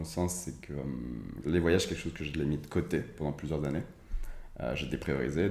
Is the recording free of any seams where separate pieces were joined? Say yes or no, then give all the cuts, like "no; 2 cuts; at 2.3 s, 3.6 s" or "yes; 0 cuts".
no; 1 cut; at 1.3 s